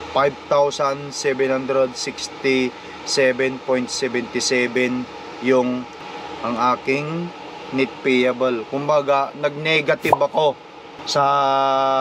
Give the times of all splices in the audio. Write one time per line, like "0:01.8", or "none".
none